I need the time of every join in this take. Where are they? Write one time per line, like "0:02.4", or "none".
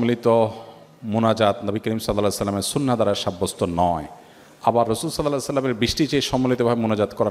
none